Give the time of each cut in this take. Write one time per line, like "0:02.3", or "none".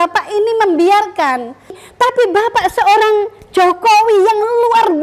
0:01.8